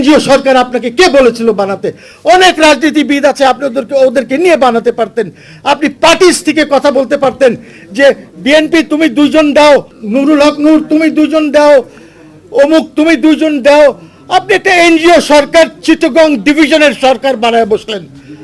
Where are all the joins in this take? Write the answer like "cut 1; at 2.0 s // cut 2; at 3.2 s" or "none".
cut 1; at 10.0 s